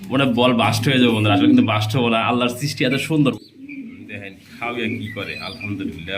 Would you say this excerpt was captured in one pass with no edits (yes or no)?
no